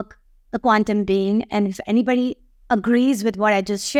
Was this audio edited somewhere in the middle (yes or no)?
no